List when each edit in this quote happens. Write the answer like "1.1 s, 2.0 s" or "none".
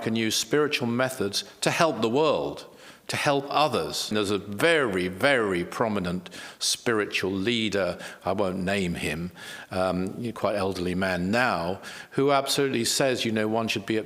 4.1 s